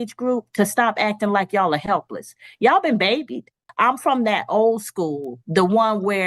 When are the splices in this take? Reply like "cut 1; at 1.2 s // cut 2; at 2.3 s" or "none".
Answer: cut 1; at 3.6 s